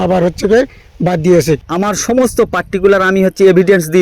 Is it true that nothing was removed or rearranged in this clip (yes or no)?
no